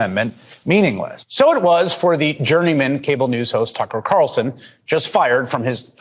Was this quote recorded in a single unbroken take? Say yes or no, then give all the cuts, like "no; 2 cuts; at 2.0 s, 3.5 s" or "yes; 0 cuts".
yes; 0 cuts